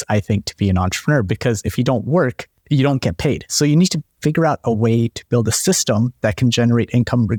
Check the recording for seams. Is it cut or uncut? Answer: uncut